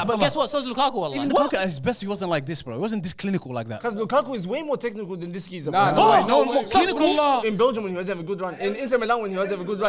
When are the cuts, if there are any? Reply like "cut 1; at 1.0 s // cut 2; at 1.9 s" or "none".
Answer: cut 1; at 1.1 s // cut 2; at 3.8 s // cut 3; at 7.4 s